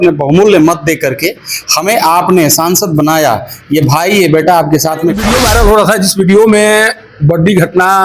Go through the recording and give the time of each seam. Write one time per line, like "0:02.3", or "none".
0:05.3